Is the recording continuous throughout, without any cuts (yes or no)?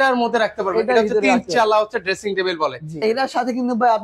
no